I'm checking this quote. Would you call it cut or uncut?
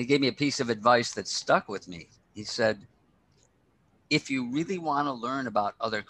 uncut